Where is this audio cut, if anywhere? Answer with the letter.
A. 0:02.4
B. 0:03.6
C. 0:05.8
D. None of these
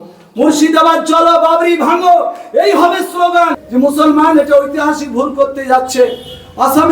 B